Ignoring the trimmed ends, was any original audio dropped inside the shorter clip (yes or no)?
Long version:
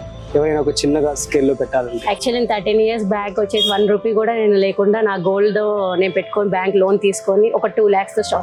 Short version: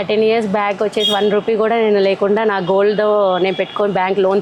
no